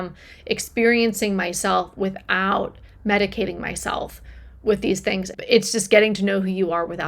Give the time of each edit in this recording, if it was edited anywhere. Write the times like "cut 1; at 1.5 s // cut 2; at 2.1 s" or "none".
cut 1; at 5.3 s